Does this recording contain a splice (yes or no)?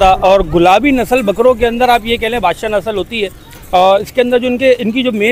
no